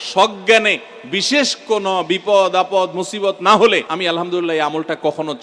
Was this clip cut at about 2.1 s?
no; 1 cut; at 3.9 s

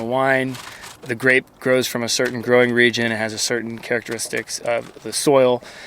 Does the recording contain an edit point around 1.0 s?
yes; 1 cut; at 1.0 s

